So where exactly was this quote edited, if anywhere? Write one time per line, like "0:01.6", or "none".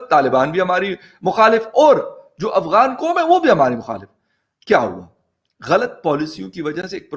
none